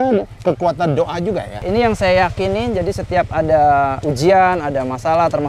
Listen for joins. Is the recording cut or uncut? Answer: cut